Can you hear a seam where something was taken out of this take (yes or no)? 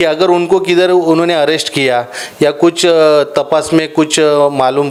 no